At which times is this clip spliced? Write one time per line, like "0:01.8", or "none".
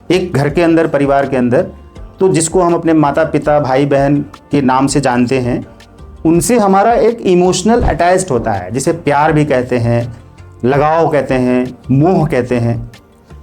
none